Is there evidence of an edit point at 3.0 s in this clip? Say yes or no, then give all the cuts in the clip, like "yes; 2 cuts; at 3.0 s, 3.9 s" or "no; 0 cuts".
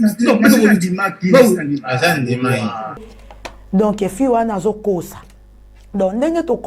yes; 1 cut; at 3.0 s